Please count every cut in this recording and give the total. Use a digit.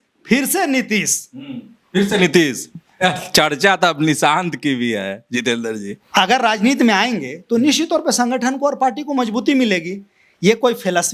1